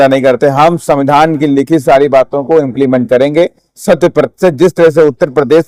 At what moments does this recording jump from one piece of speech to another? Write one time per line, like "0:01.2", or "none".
none